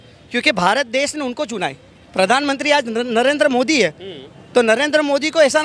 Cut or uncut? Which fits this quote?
uncut